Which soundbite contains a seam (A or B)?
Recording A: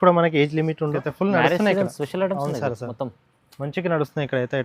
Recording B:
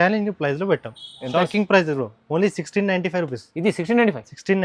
A